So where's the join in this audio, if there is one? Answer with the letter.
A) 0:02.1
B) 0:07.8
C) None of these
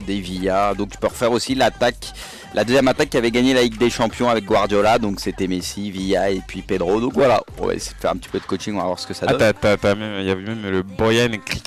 B